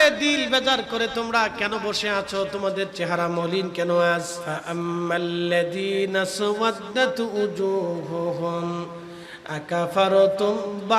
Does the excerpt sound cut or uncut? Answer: cut